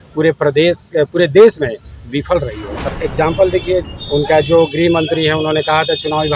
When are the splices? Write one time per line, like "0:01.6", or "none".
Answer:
0:02.9
0:03.8